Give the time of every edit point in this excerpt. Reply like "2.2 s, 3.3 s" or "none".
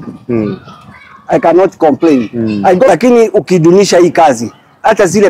2.9 s